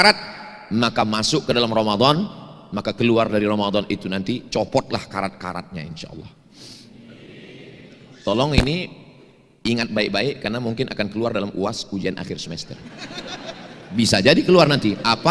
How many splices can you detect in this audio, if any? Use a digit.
0